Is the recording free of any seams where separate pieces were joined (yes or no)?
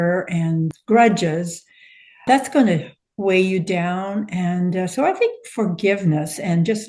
yes